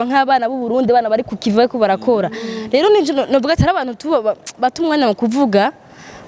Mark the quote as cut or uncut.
uncut